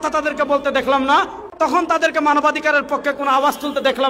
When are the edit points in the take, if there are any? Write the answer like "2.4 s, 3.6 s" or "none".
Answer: 1.5 s